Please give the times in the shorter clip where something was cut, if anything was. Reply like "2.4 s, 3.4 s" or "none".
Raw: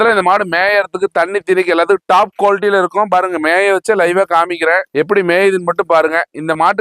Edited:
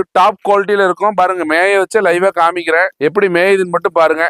none